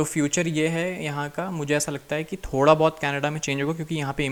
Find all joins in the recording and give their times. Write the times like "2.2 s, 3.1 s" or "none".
none